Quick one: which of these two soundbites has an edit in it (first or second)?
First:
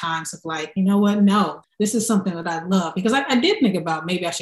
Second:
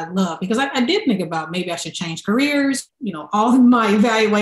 second